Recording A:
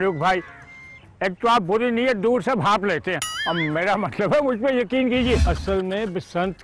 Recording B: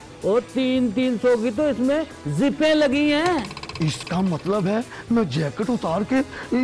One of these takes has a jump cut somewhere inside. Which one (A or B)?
A